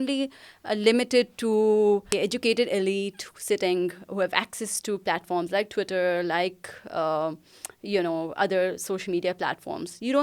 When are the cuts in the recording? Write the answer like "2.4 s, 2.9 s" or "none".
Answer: 2.1 s